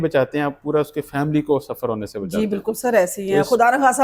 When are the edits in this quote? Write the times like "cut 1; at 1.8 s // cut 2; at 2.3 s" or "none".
none